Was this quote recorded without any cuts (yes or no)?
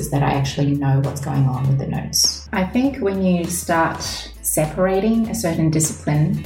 no